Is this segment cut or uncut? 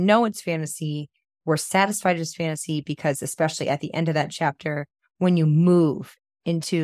uncut